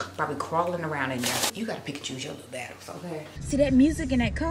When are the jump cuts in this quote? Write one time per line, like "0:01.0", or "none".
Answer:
0:01.5
0:03.3